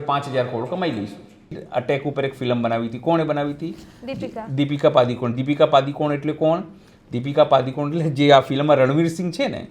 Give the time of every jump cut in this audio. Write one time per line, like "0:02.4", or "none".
0:01.6